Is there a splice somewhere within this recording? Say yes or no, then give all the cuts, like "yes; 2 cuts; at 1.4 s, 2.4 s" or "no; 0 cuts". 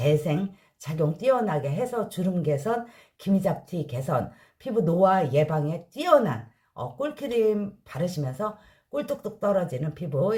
no; 0 cuts